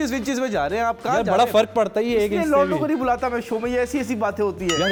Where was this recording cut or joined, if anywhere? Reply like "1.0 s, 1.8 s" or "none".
none